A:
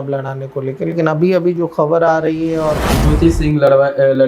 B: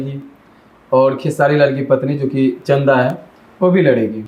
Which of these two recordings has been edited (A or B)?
A